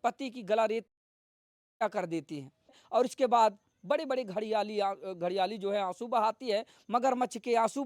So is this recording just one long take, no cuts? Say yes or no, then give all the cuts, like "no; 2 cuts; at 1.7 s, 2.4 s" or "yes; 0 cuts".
yes; 0 cuts